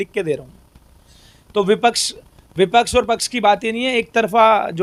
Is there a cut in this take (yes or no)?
no